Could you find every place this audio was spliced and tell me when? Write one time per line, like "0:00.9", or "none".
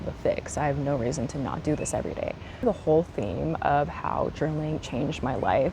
0:02.4